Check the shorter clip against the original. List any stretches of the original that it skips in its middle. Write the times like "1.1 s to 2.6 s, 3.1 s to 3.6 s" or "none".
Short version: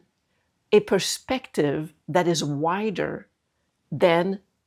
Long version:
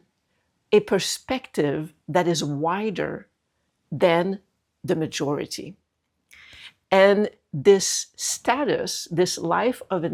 none